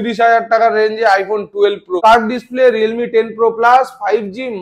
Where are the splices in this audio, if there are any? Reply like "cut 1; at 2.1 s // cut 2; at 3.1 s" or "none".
cut 1; at 1.9 s